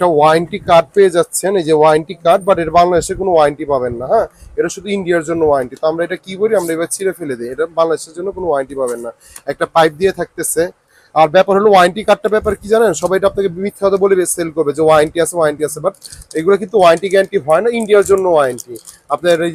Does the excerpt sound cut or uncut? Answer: uncut